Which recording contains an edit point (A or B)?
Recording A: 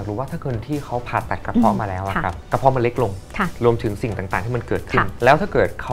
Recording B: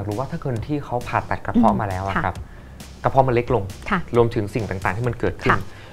A